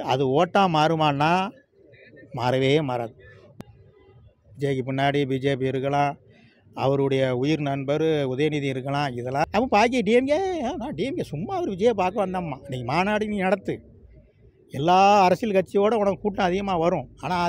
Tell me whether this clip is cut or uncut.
cut